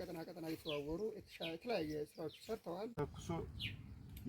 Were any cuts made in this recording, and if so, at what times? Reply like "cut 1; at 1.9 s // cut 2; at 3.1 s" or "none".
cut 1; at 2.9 s